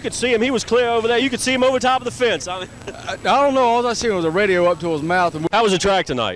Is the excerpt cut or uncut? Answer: cut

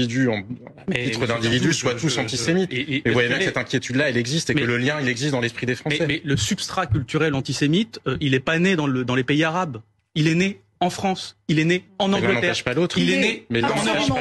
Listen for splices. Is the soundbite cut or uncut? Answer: cut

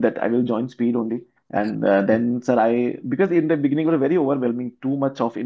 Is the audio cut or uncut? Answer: cut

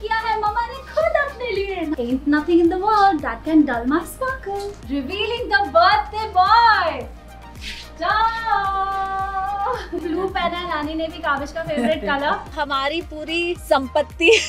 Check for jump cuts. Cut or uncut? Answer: cut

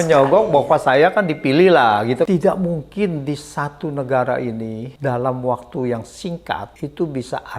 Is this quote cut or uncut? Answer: cut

